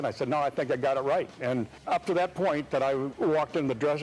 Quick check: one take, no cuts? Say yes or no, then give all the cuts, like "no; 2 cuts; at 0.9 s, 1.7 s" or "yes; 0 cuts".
no; 1 cut; at 1.8 s